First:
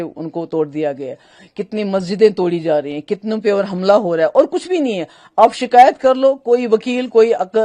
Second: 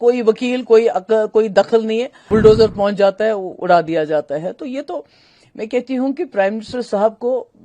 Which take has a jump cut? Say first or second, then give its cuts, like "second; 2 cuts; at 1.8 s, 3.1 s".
second; 1 cut; at 2.2 s